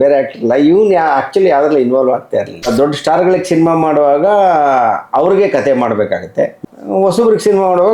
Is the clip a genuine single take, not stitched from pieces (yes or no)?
no